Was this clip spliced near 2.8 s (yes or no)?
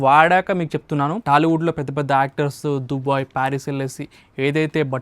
no